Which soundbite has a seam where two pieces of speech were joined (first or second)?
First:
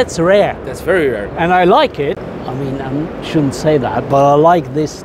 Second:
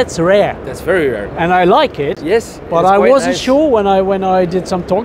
first